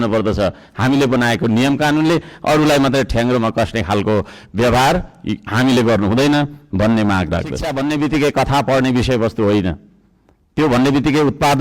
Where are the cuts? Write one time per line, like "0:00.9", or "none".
0:07.7